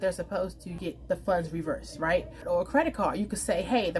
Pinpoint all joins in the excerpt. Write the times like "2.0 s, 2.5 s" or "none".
0.8 s, 2.3 s